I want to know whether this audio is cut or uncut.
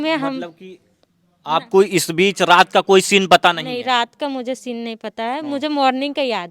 uncut